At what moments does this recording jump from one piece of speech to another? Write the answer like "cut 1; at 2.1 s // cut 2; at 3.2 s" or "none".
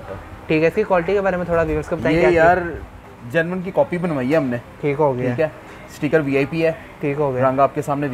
none